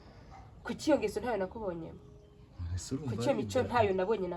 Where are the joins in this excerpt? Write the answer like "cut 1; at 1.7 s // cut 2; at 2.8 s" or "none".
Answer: none